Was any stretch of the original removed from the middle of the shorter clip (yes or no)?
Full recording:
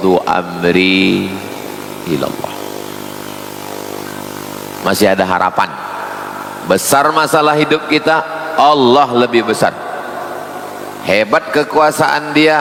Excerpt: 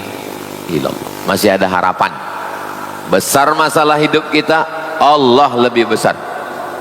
yes